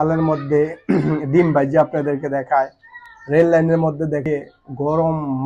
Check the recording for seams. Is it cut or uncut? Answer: cut